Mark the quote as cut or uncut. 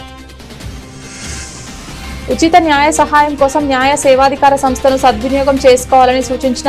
uncut